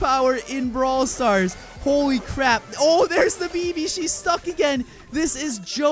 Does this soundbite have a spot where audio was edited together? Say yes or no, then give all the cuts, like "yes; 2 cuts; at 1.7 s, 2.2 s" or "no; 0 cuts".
no; 0 cuts